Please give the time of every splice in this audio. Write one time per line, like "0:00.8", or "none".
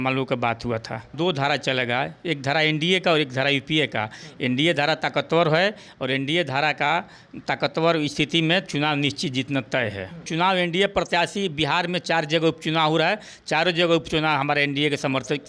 0:01.1
0:10.3